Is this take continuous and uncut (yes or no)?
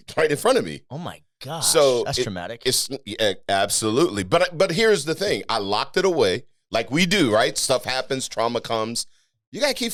yes